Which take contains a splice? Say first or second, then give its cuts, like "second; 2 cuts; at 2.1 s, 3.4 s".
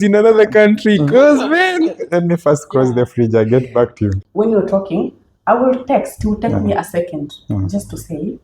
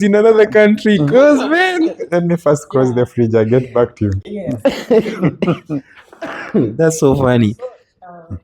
first; 1 cut; at 4.2 s